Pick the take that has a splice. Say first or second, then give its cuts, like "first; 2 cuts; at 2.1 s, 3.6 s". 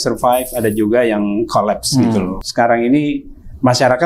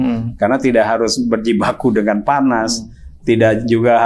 first; 1 cut; at 2.4 s